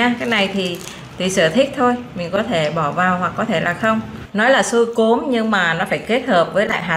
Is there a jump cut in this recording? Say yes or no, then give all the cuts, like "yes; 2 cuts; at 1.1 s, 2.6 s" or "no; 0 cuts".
yes; 1 cut; at 4.2 s